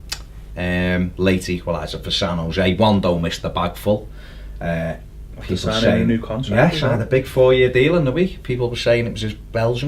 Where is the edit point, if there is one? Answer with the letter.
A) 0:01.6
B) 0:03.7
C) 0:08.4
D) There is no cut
B